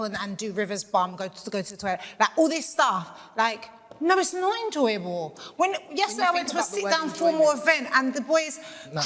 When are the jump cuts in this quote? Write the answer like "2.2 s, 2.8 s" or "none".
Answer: none